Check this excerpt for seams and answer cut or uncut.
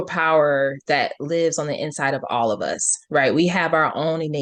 uncut